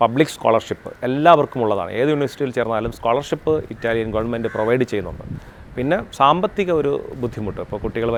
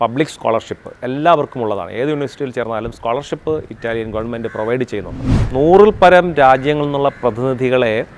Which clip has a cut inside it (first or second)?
second